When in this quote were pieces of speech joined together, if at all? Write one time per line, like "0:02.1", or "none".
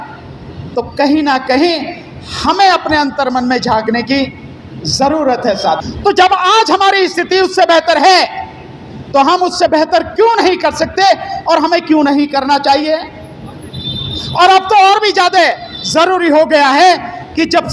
0:05.8